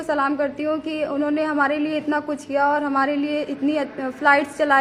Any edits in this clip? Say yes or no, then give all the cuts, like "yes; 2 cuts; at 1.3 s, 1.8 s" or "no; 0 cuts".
no; 0 cuts